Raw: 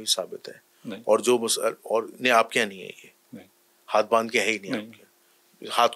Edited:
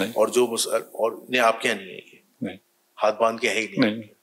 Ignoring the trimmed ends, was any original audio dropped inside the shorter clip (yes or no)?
no